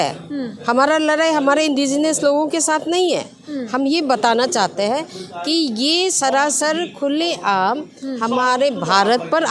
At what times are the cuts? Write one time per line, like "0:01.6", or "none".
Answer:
none

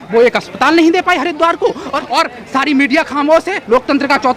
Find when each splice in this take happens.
0:01.9

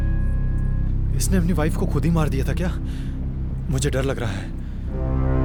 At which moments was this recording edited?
none

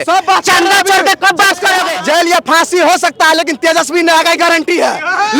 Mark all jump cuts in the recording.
0:01.9

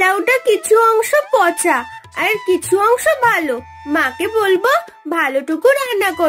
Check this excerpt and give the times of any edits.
none

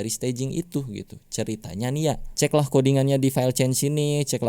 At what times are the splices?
0:02.3

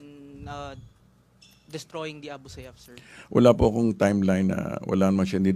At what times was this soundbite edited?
0:03.1

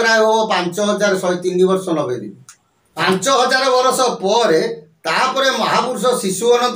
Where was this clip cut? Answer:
0:03.0

